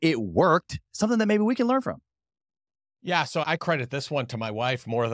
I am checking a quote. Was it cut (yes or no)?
yes